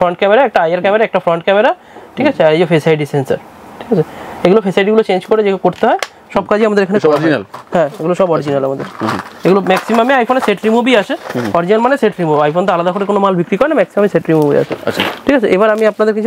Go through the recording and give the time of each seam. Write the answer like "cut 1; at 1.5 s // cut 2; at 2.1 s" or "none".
none